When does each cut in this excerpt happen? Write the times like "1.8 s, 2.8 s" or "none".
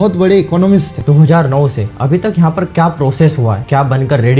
0.9 s, 3.6 s